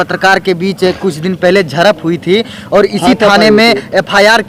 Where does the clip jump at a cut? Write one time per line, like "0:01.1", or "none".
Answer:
none

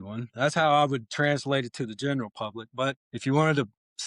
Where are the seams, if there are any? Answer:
0:03.1

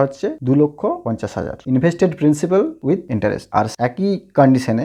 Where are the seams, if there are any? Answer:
none

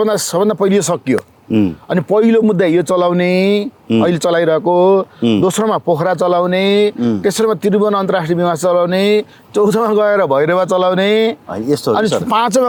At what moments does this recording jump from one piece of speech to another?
none

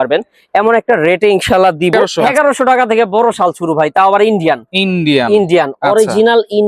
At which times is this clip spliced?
0:02.0

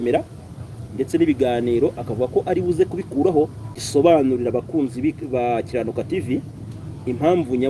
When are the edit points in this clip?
0:03.3

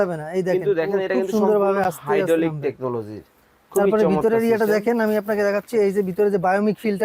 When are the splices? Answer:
none

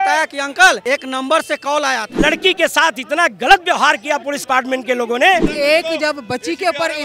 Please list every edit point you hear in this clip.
0:00.8
0:02.1
0:05.4

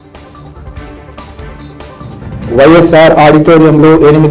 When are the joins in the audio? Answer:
0:01.8

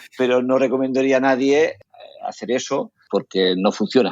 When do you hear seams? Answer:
0:01.8
0:03.0

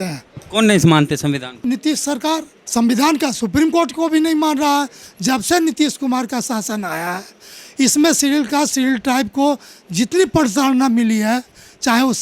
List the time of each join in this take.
0:01.6
0:02.6
0:05.0

